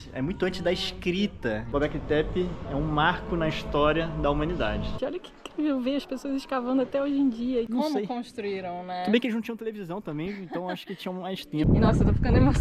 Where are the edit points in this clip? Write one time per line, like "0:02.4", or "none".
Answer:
0:01.6
0:05.0
0:07.7
0:11.7